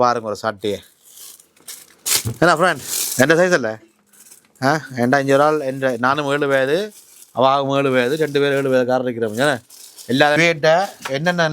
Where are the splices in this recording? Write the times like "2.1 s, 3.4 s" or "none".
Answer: 10.4 s

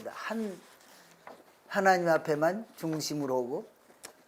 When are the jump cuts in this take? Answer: none

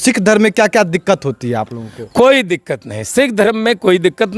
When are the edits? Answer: none

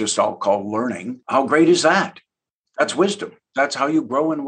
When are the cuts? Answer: 1.1 s, 3.4 s

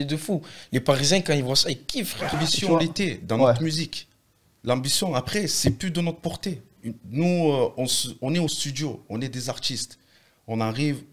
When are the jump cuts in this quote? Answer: 2.4 s

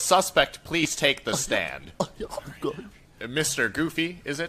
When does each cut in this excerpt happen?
3.5 s

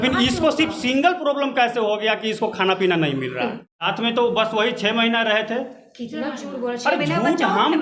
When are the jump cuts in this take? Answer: 3.9 s

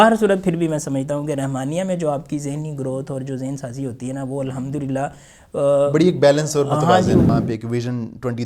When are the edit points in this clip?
7.3 s

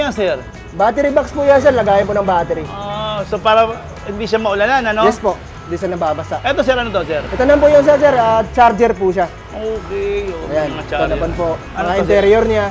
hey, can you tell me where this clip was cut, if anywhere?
7.3 s, 11.7 s

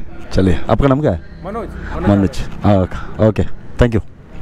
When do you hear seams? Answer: none

